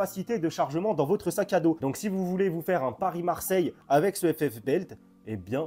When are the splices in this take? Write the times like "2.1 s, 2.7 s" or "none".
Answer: none